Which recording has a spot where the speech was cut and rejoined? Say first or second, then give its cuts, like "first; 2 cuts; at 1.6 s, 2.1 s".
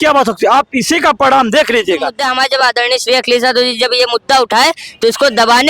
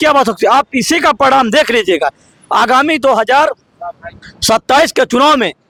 first; 1 cut; at 2.2 s